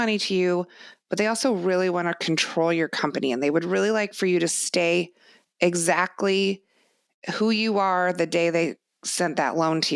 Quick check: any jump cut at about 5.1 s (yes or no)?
no